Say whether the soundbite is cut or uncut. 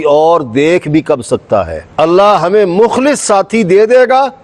cut